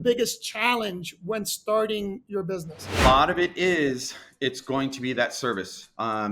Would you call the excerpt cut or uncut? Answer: cut